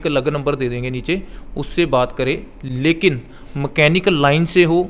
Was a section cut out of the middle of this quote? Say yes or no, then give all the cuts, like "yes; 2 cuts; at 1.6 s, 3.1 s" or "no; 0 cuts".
no; 0 cuts